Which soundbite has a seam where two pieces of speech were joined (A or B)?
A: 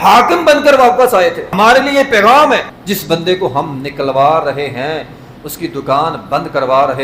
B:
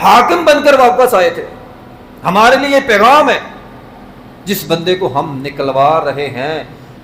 A